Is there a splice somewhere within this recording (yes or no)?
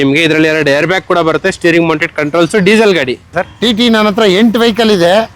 yes